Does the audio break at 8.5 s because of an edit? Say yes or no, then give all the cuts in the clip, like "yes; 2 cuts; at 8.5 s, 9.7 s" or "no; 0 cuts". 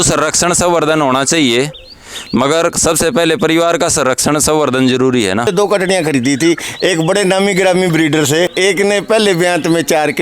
yes; 2 cuts; at 5.5 s, 8.5 s